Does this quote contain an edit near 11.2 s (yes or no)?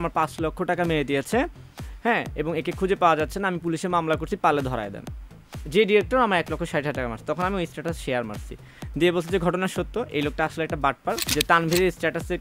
yes